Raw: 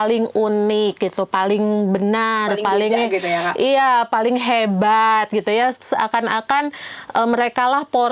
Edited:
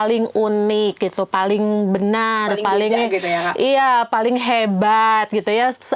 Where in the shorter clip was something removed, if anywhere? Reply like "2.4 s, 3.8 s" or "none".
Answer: none